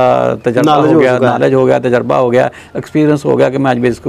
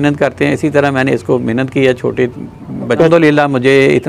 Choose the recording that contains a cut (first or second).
second